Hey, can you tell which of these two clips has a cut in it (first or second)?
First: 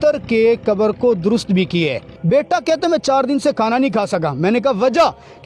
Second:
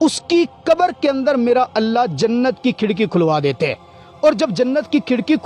first